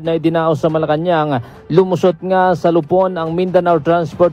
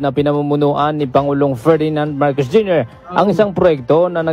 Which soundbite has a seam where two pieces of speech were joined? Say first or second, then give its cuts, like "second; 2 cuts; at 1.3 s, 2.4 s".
second; 1 cut; at 3.2 s